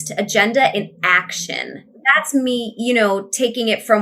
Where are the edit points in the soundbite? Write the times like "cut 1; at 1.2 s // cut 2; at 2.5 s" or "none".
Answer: cut 1; at 1.9 s